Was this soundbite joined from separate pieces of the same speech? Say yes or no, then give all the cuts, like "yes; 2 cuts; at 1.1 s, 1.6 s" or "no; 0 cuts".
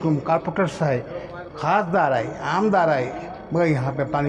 no; 0 cuts